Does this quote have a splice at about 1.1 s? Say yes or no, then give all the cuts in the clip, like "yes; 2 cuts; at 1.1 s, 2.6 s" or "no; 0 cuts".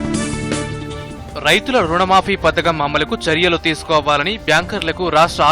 yes; 1 cut; at 1.1 s